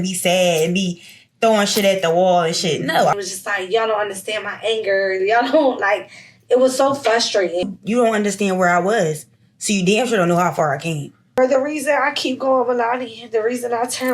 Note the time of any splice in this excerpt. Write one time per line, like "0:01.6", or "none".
0:03.1
0:07.6
0:11.4